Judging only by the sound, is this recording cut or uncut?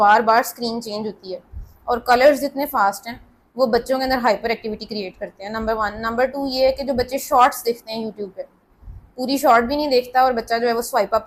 uncut